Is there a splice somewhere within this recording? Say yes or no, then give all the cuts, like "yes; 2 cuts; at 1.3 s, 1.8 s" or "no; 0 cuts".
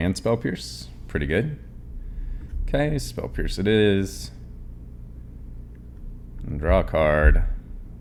no; 0 cuts